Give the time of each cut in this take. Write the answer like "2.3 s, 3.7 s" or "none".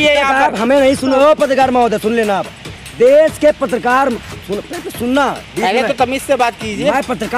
1.2 s